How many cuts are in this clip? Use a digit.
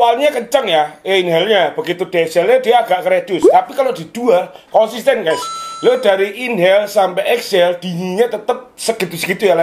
0